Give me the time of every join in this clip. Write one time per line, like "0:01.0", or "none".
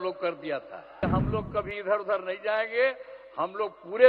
0:01.0

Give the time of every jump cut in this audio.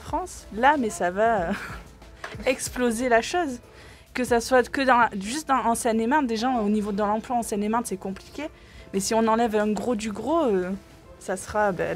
none

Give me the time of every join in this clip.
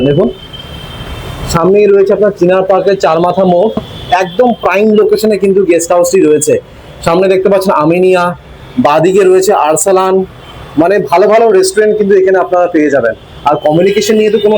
0:03.9

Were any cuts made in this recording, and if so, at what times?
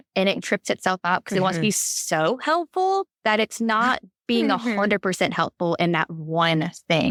none

